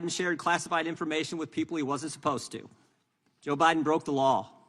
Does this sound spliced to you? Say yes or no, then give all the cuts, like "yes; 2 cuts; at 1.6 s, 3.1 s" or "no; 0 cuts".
no; 0 cuts